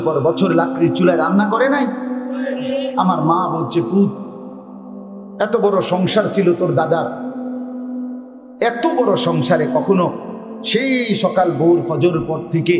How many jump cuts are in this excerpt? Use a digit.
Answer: 2